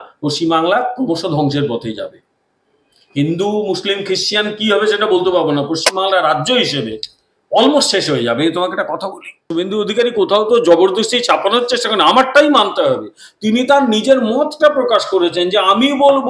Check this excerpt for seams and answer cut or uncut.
cut